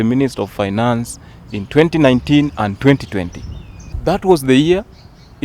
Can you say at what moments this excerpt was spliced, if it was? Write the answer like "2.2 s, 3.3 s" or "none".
3.9 s